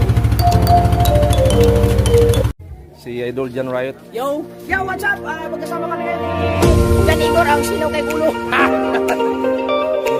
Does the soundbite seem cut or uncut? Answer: uncut